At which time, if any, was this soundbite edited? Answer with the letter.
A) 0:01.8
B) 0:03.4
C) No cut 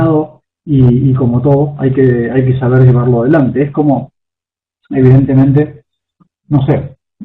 B